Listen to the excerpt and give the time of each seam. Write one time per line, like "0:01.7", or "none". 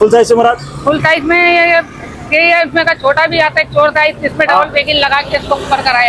none